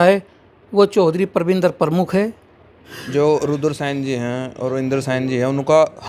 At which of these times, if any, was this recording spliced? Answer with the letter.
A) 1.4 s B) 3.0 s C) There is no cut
B